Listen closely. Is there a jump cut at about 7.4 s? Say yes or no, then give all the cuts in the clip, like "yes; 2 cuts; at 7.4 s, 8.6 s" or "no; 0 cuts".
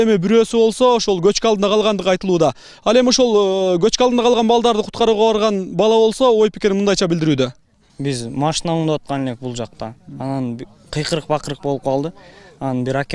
no; 0 cuts